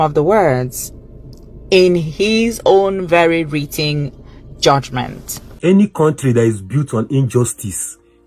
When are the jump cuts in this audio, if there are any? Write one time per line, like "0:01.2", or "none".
0:05.6